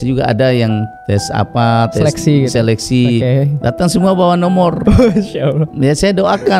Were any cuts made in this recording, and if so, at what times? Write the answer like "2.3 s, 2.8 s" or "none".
0.9 s